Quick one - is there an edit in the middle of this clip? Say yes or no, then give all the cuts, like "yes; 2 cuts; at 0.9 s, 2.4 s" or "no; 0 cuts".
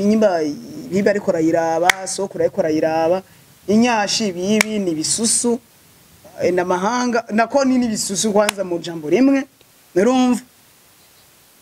no; 0 cuts